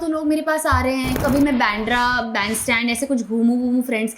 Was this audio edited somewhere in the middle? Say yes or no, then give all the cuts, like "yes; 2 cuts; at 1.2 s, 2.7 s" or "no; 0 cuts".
yes; 1 cut; at 1.2 s